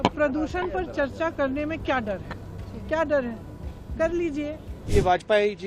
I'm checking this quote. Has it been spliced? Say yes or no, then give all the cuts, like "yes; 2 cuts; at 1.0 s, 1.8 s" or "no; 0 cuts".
yes; 1 cut; at 4.7 s